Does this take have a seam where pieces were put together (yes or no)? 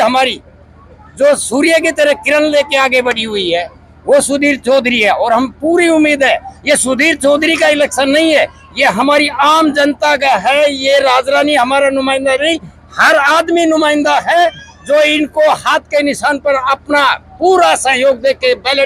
no